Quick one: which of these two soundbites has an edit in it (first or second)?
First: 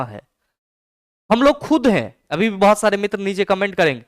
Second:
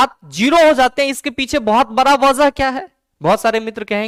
first